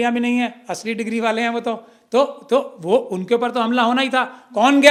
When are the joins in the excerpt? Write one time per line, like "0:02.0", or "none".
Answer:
none